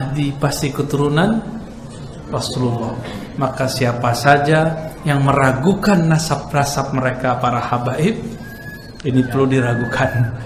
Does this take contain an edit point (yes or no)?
no